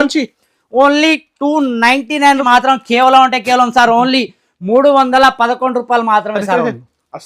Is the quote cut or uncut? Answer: cut